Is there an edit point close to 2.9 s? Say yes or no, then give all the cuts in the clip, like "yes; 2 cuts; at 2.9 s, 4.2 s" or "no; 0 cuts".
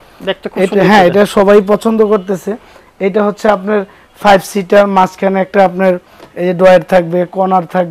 no; 0 cuts